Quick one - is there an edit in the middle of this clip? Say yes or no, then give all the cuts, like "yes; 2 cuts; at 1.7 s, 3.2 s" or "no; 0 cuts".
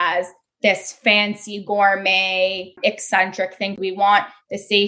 yes; 2 cuts; at 2.7 s, 3.8 s